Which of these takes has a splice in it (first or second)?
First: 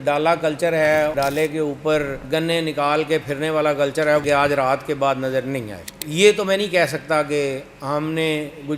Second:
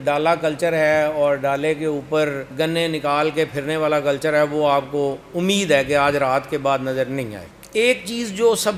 first